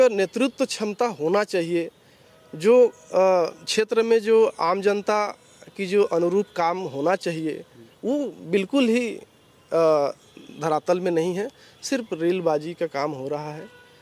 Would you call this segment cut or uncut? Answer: uncut